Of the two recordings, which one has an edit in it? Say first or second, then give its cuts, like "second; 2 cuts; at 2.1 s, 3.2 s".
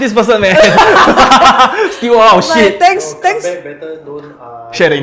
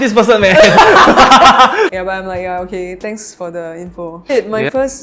second; 2 cuts; at 1.9 s, 4.3 s